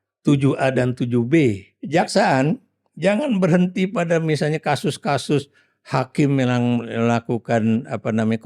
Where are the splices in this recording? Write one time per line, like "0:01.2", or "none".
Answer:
0:01.7